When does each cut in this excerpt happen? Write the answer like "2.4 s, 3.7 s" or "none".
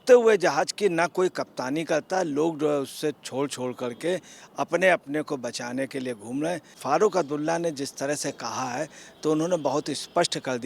6.8 s